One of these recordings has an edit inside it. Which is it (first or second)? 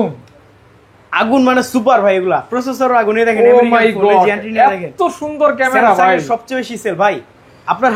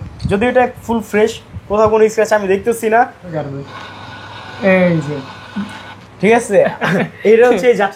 second